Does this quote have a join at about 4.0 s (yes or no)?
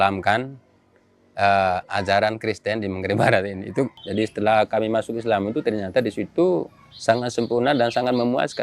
yes